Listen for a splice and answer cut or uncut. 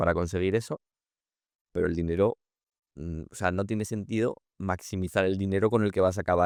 uncut